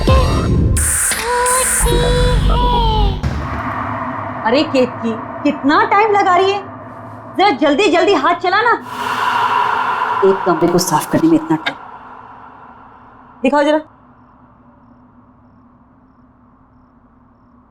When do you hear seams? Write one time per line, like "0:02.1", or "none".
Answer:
0:03.2